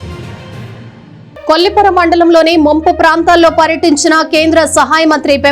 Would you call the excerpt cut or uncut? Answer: cut